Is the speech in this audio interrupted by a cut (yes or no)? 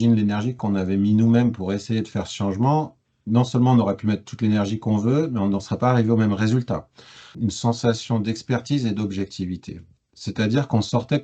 yes